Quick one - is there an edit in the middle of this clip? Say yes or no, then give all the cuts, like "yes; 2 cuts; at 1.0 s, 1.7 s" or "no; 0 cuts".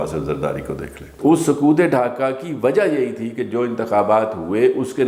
yes; 1 cut; at 1.1 s